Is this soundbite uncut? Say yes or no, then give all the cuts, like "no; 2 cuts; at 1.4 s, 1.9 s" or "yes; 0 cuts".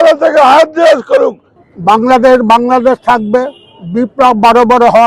no; 1 cut; at 1.5 s